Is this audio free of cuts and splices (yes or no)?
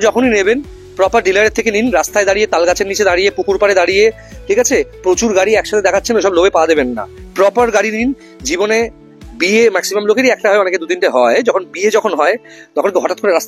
yes